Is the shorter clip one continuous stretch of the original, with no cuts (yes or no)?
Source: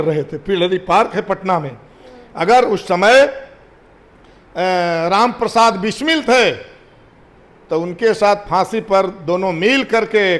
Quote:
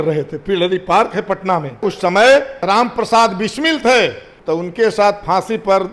no